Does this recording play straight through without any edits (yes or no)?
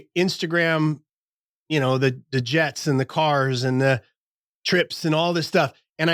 yes